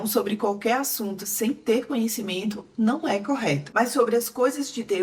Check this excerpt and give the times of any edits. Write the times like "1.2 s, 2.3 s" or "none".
none